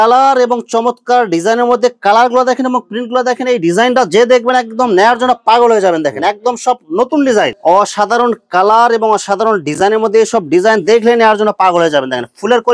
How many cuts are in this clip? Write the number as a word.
one